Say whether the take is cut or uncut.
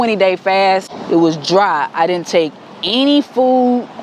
cut